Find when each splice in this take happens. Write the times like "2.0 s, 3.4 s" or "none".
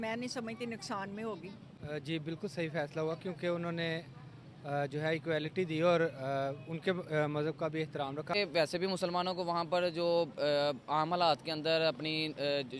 1.9 s, 8.3 s